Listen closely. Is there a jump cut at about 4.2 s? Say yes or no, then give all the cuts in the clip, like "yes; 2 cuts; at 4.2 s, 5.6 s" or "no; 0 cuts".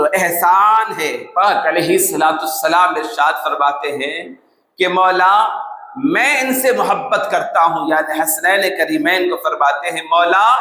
no; 1 cut; at 1.2 s